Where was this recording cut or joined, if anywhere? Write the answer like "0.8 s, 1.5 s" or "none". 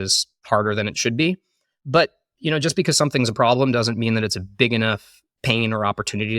none